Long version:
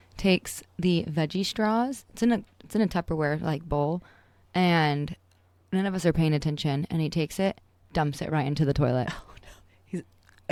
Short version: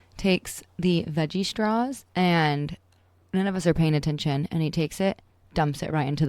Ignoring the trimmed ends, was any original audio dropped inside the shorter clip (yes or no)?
yes